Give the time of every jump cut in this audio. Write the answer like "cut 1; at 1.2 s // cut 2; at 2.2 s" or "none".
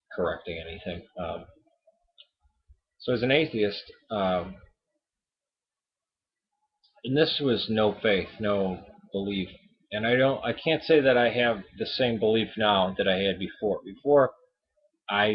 cut 1; at 13.5 s

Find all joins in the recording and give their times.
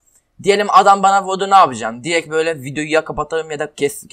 none

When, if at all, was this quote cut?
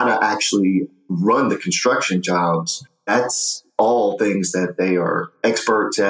cut 1; at 0.9 s // cut 2; at 3.0 s

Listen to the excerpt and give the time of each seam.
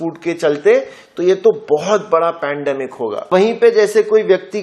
cut 1; at 3.3 s

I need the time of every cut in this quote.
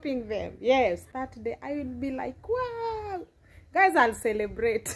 cut 1; at 1.1 s

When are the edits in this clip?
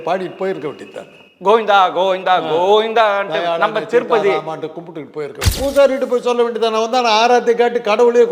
cut 1; at 5.5 s

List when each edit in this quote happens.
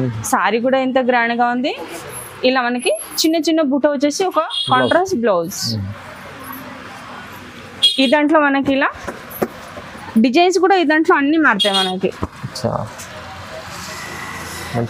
none

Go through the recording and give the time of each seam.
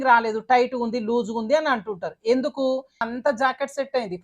cut 1; at 3.1 s

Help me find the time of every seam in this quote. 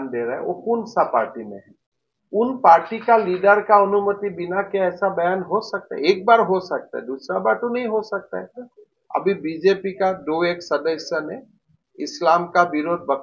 none

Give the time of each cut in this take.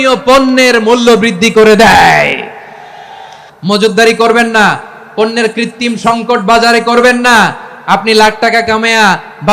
cut 1; at 3.4 s

